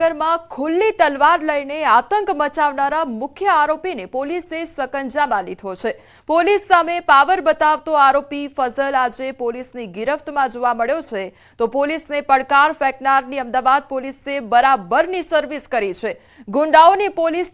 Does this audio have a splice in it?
yes; 1 cut; at 7.8 s

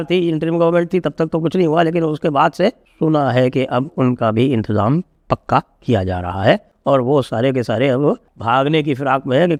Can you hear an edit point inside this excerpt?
no; 0 cuts

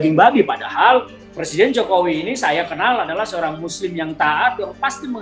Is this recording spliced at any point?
no; 0 cuts

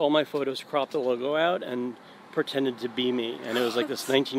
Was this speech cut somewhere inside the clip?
no; 0 cuts

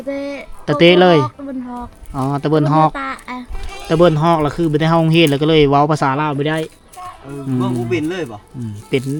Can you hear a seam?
no; 0 cuts

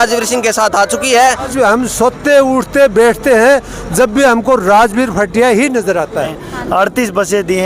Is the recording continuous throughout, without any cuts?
no; 2 cuts; at 1.5 s, 6.4 s

